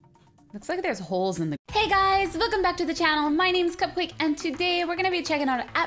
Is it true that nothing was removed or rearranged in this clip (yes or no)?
yes